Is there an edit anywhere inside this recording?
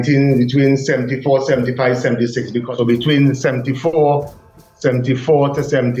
yes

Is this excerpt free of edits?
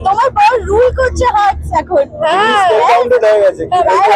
yes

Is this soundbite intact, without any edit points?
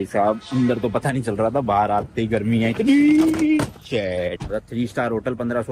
no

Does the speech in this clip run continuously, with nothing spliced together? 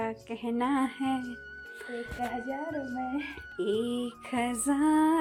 yes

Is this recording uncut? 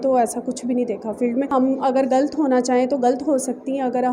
no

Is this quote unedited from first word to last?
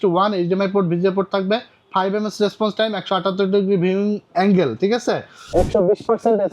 no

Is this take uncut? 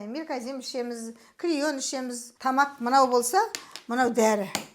no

